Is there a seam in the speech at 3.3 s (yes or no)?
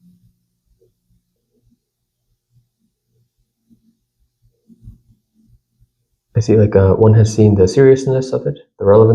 no